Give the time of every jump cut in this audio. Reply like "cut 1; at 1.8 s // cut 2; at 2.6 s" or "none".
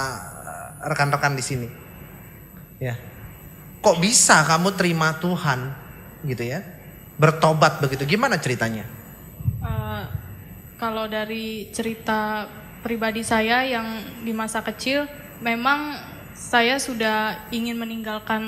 none